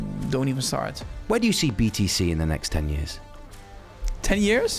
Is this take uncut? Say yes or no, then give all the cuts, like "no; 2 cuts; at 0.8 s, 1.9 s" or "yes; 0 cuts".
no; 1 cut; at 1.1 s